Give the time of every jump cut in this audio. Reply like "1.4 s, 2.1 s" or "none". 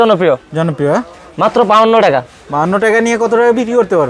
none